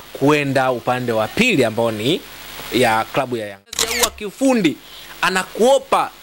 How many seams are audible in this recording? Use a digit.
1